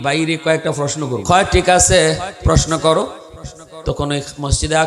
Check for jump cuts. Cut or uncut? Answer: cut